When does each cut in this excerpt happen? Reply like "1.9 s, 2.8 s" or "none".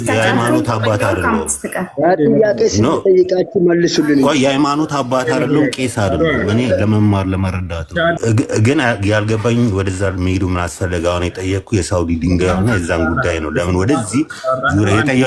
8.2 s